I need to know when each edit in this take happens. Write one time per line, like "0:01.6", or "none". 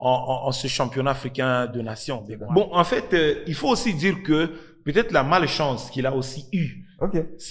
0:02.3